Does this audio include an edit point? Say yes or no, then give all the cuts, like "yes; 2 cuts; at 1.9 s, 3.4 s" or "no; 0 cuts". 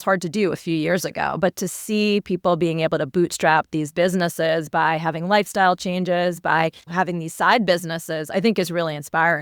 yes; 1 cut; at 6.9 s